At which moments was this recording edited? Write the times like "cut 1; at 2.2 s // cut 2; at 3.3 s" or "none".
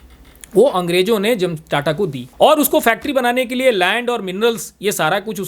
cut 1; at 2.2 s